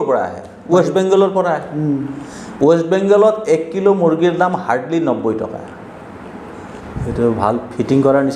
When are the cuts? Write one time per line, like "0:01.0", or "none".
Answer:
0:06.8